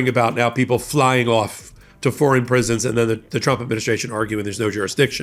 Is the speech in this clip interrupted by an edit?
no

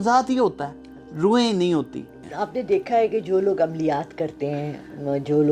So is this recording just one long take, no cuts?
no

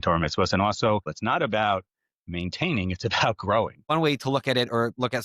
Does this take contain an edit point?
yes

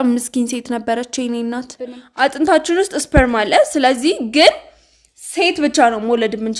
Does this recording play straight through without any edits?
no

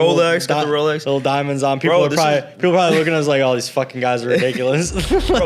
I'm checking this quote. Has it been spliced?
no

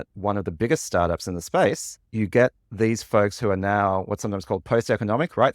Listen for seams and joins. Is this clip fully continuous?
no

